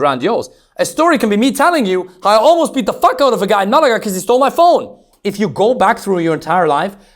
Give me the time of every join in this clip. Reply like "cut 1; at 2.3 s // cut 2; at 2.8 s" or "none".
cut 1; at 5.0 s